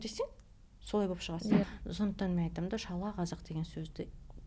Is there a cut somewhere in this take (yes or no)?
yes